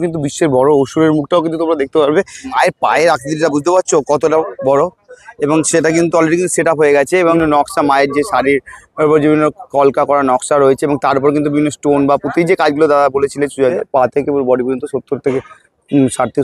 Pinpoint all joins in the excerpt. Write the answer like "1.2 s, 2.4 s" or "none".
2.5 s, 7.4 s, 13.7 s